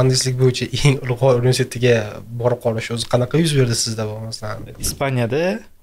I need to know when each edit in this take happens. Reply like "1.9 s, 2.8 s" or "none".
4.8 s